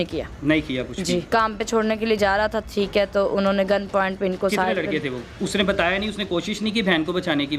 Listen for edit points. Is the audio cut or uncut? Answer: cut